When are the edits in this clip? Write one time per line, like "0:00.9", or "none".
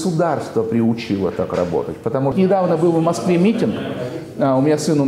0:02.3